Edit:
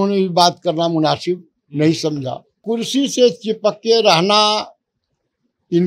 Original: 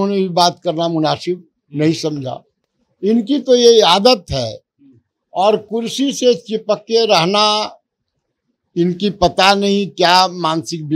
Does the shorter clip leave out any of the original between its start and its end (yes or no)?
yes